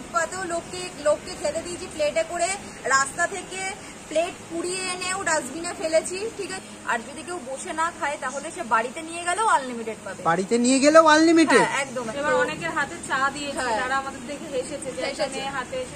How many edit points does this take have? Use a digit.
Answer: 2